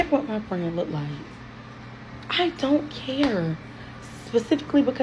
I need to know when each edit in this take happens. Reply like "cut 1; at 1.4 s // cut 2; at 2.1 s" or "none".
none